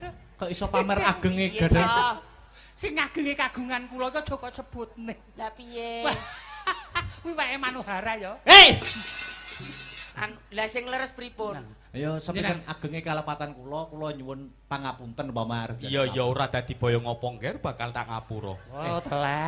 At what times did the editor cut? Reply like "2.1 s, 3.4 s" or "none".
10.1 s